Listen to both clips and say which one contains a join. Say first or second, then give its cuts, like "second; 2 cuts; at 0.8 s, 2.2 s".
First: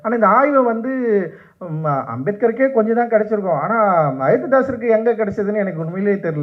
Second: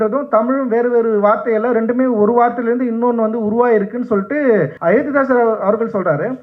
second; 1 cut; at 4.7 s